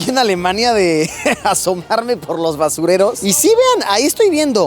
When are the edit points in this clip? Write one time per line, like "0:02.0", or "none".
none